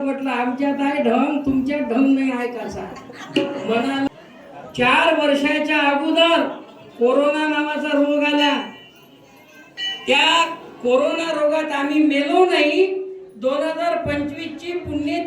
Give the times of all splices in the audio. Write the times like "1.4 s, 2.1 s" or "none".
4.1 s